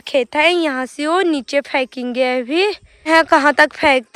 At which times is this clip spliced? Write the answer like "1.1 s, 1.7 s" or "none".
3.1 s